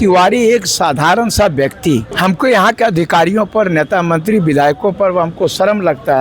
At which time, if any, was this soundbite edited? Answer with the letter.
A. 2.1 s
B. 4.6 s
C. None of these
A